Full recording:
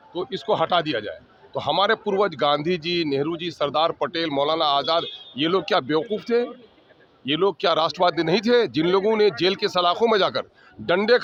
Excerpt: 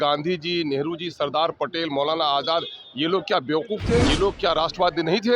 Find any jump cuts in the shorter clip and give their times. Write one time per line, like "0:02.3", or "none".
0:04.1